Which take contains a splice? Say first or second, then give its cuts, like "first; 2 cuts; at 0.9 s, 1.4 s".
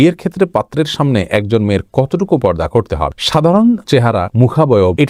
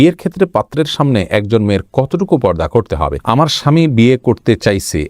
second; 1 cut; at 3.2 s